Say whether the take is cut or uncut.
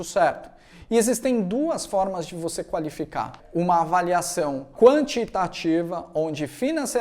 cut